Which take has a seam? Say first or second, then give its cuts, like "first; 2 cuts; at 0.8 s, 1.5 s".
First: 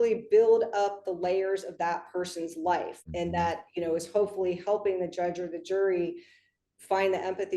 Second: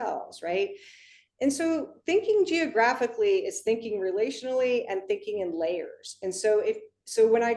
first; 1 cut; at 3.0 s